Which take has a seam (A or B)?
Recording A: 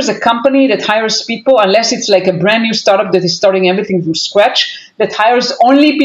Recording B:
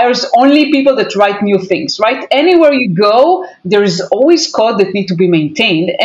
B